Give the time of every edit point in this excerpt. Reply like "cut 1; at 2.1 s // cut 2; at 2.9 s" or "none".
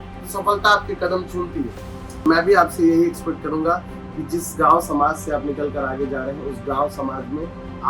cut 1; at 2.2 s